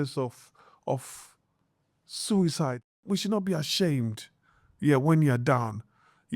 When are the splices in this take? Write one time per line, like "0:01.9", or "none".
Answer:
0:02.9

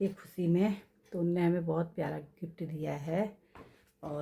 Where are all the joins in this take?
none

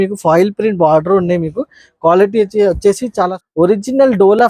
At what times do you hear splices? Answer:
0:03.3

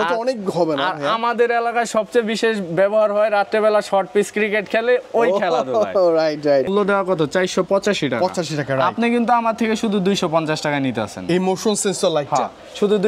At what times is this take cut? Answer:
0:06.7

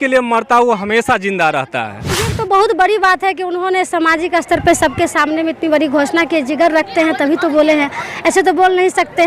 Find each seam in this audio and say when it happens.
0:02.2

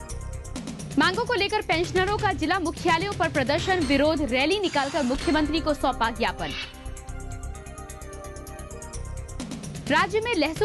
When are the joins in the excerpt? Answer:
0:00.9

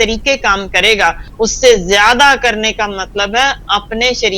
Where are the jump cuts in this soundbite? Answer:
0:01.3

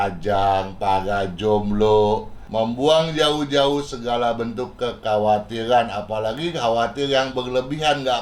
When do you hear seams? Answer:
0:02.4

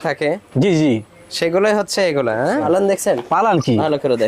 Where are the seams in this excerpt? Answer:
0:02.6

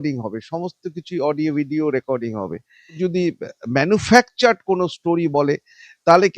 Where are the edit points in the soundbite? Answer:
0:03.0

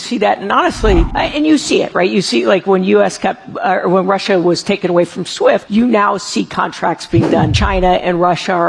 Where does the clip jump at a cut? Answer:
0:01.1
0:05.7
0:07.6

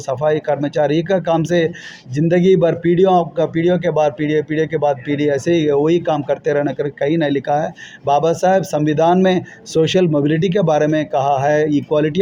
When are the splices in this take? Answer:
none

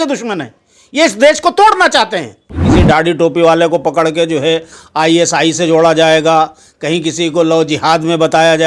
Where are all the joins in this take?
0:02.7

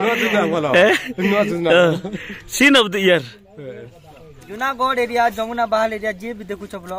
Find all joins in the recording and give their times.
0:04.5

